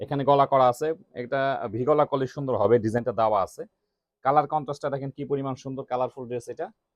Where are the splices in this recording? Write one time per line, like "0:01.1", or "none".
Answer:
none

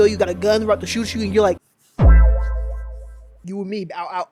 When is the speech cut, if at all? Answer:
none

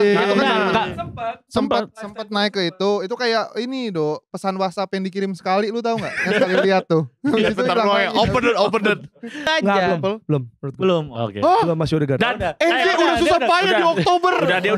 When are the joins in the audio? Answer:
0:09.4

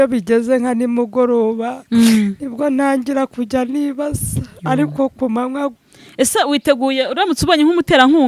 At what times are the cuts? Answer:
0:05.8

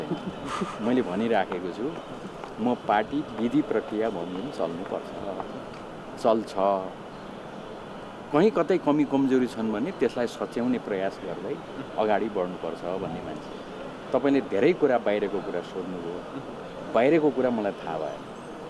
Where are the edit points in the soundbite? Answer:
none

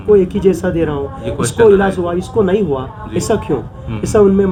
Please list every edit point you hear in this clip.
none

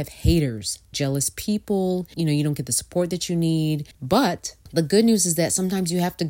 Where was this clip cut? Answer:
0:00.9
0:02.1
0:03.9

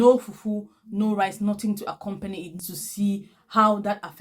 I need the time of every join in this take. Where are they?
0:02.5

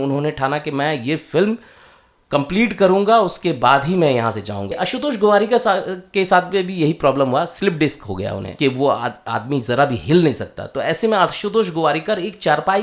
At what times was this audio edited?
0:04.7
0:08.4

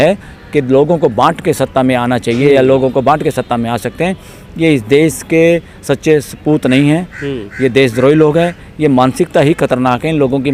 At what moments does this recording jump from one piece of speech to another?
none

